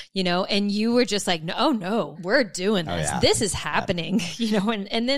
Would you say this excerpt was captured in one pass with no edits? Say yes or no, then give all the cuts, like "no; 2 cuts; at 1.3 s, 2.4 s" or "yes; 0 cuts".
no; 1 cut; at 2.2 s